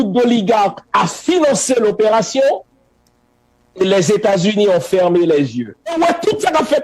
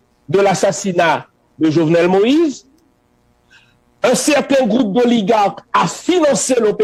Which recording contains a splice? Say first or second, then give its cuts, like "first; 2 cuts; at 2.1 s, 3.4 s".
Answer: first; 1 cut; at 5.9 s